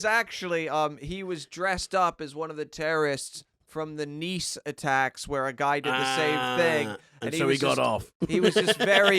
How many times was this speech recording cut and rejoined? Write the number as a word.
one